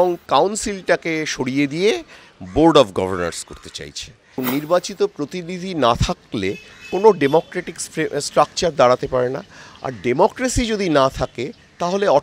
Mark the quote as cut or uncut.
cut